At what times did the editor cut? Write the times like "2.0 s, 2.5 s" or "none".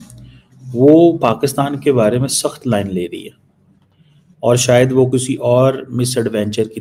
none